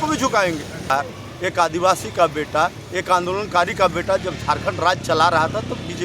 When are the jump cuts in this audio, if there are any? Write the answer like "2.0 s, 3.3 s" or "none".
0.9 s